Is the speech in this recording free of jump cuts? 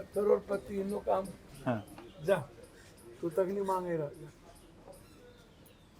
no; 1 cut; at 1.4 s

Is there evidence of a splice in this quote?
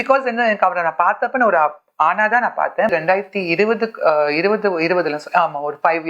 yes; 1 cut; at 2.9 s

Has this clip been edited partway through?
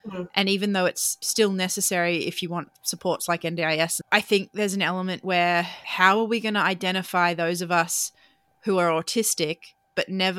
yes; 1 cut; at 1.2 s

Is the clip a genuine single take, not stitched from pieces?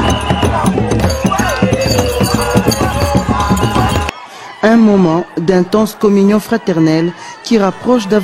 no; 1 cut; at 4.0 s

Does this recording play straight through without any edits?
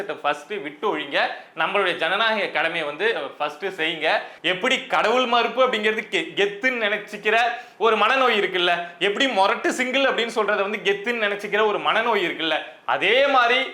no; 1 cut; at 4.3 s

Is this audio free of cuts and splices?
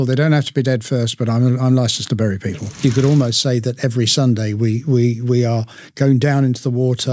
no; 1 cut; at 2.8 s

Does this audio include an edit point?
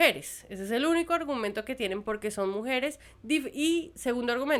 no; 0 cuts

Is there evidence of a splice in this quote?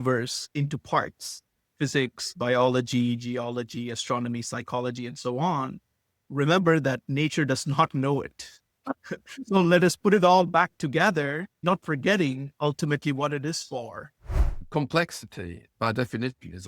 yes; 1 cut; at 14.6 s

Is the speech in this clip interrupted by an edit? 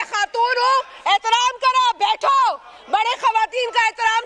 no; 0 cuts

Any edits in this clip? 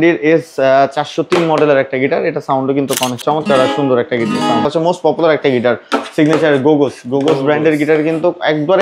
yes; 2 cuts; at 3.2 s, 4.7 s

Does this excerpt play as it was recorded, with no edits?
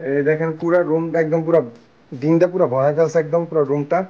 yes; 0 cuts

